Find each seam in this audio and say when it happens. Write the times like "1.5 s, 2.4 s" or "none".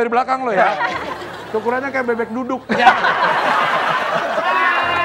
none